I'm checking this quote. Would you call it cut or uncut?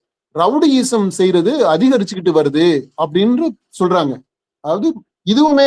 uncut